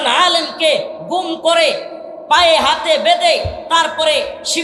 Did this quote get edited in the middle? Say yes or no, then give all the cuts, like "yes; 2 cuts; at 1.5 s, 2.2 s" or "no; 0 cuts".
no; 0 cuts